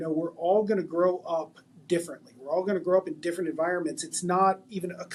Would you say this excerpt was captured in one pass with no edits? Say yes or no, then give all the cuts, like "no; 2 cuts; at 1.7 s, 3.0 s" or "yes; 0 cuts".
yes; 0 cuts